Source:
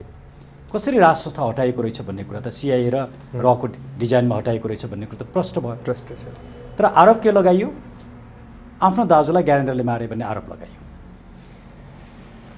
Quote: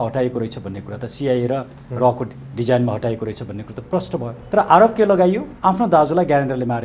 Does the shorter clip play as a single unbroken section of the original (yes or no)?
no